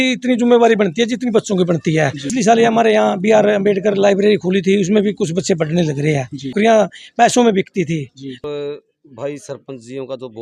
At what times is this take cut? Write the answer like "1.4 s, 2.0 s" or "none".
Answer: 2.3 s, 6.5 s, 8.4 s